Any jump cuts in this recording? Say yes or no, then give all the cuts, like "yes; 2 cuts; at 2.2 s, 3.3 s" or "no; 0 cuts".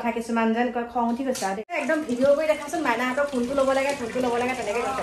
yes; 1 cut; at 1.8 s